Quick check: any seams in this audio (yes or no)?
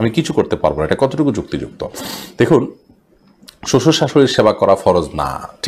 no